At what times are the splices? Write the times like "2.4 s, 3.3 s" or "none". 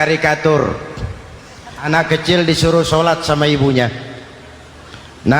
1.9 s